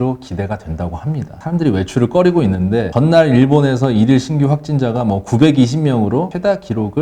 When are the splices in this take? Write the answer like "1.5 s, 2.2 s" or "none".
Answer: none